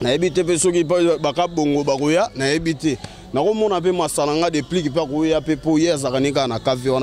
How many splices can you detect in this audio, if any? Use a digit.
0